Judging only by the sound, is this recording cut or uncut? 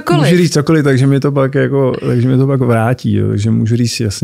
uncut